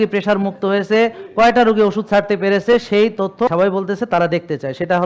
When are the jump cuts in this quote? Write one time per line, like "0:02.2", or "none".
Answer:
0:03.5